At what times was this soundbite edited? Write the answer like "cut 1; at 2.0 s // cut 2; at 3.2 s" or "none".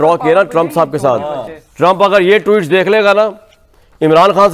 none